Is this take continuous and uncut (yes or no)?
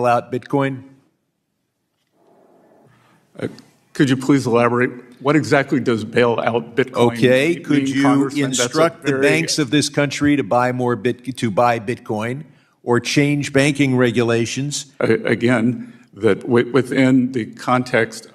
no